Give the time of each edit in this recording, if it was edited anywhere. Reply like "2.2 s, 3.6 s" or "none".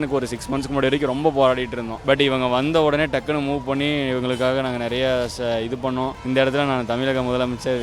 1.9 s, 6.2 s

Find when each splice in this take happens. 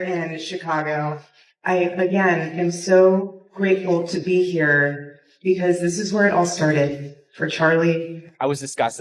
none

